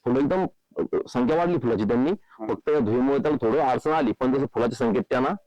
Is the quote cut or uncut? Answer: uncut